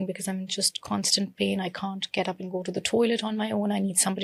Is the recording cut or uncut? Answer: uncut